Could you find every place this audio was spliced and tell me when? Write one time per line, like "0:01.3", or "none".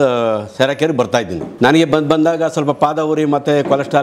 0:01.4